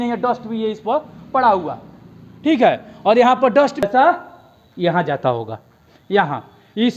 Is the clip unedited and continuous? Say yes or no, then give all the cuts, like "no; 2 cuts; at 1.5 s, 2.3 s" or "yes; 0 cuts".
no; 1 cut; at 3.8 s